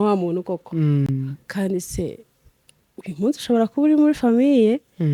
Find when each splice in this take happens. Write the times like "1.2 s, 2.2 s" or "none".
none

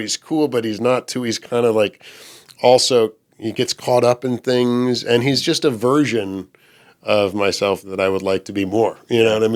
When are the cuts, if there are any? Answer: none

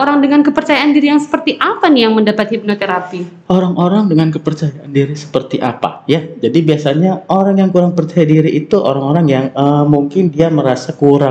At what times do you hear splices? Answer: none

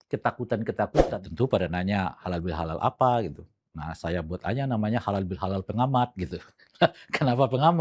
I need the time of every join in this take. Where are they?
1.0 s

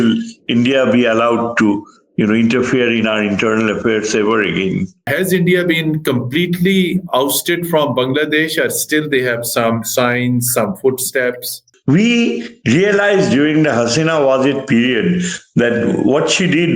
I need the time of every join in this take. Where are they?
5.0 s, 11.6 s

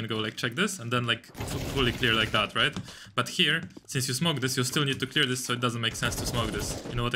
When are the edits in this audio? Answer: none

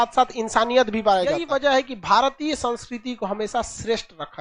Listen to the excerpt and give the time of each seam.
1.4 s

